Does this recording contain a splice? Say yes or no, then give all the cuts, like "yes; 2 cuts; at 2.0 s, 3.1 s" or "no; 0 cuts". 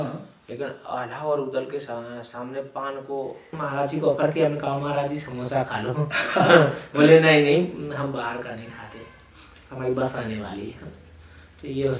yes; 1 cut; at 3.5 s